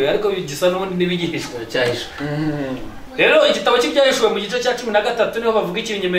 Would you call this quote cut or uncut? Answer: cut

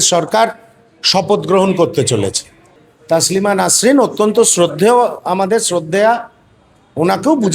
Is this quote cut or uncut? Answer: cut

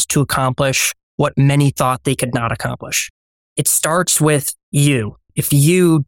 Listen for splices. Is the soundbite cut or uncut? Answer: cut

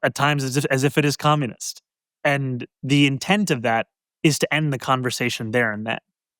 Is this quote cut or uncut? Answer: uncut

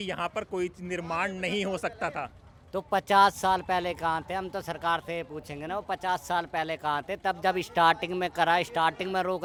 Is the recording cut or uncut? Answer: uncut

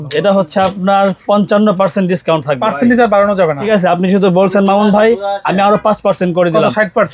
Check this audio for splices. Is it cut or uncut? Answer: cut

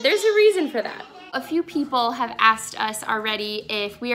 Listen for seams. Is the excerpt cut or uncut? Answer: cut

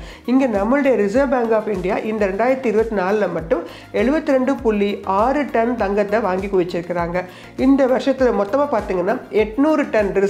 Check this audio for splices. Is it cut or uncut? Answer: uncut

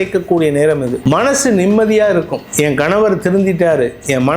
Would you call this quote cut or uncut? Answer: cut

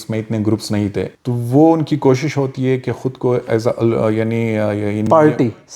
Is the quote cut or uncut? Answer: cut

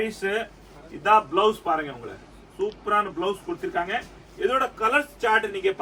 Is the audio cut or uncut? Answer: uncut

